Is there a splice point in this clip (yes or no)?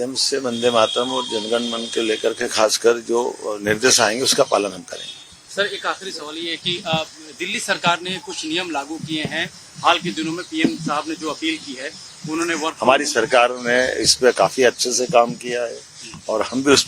no